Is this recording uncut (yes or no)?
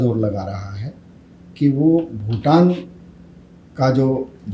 yes